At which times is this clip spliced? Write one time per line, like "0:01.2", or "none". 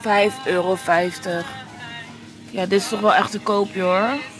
none